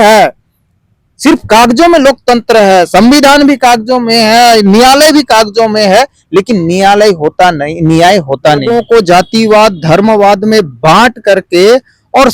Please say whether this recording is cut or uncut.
cut